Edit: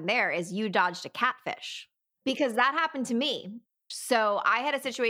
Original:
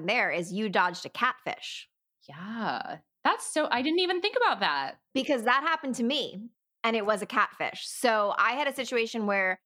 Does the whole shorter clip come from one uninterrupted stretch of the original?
no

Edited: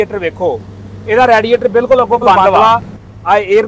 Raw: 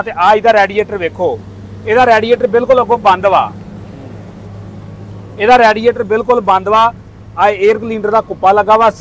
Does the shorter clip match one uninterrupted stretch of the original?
no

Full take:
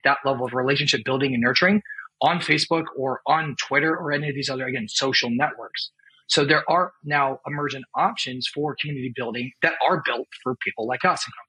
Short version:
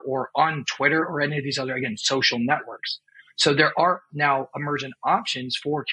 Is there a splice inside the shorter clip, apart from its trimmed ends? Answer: no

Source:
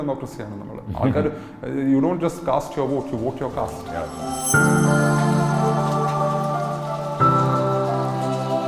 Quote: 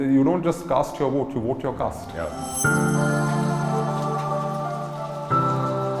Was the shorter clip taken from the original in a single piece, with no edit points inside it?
no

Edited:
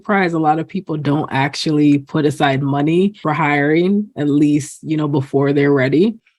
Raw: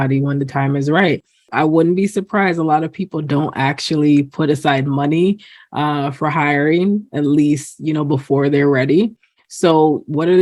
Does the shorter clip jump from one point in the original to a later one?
yes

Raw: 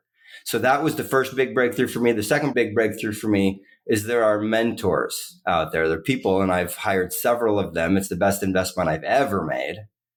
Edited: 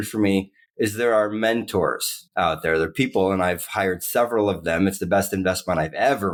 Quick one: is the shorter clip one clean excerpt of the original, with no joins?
yes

